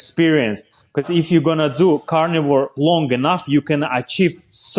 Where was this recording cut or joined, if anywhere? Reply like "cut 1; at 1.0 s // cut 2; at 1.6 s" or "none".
cut 1; at 1.0 s // cut 2; at 2.7 s